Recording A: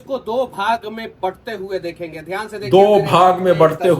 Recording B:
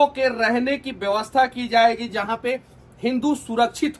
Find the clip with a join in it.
A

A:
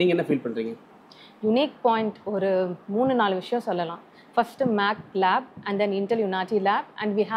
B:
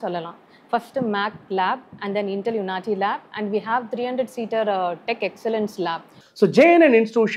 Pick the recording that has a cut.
B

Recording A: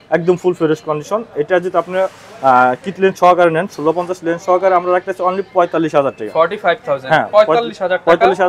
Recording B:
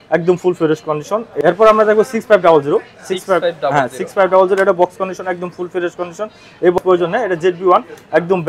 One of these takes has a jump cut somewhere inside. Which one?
B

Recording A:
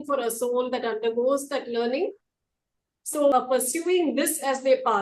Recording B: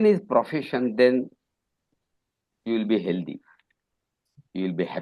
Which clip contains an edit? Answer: A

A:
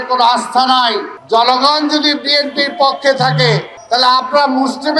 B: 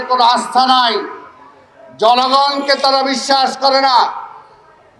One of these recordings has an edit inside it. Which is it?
A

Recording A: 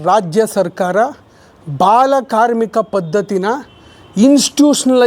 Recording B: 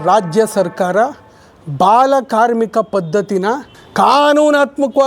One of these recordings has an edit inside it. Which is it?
B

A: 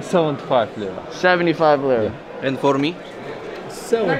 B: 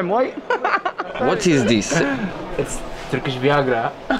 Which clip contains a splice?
B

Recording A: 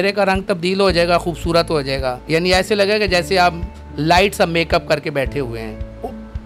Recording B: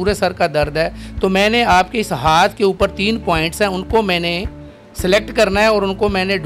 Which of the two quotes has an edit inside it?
A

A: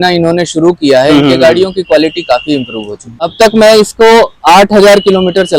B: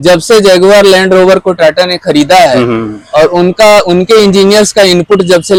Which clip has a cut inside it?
A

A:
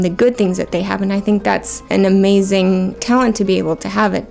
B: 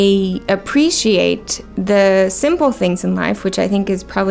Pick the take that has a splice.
A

